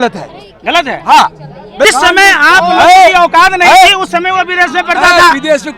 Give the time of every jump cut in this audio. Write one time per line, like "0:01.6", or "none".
0:01.9